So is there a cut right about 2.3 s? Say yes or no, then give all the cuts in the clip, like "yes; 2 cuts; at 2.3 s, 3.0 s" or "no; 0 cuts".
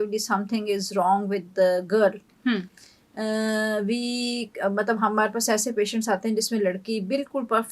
no; 0 cuts